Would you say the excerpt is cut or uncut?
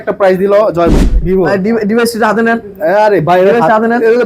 cut